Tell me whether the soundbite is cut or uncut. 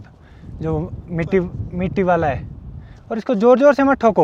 uncut